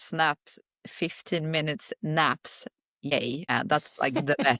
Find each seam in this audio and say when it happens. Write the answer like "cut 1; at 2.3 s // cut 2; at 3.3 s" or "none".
cut 1; at 3.1 s